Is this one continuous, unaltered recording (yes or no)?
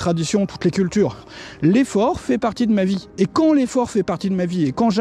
no